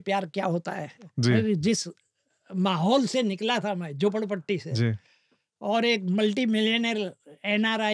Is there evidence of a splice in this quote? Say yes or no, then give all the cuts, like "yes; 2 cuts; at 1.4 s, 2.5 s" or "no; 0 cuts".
no; 0 cuts